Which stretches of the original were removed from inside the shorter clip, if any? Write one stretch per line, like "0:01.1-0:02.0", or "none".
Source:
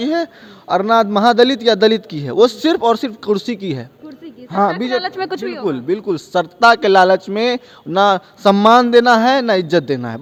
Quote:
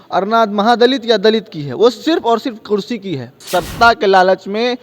0:04.0-0:06.2